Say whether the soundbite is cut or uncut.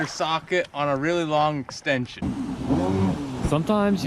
cut